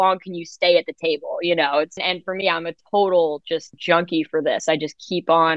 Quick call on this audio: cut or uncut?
cut